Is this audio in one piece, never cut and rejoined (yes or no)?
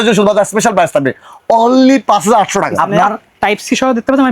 no